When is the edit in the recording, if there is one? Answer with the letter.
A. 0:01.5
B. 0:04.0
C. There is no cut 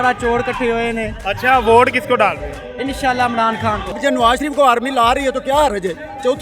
B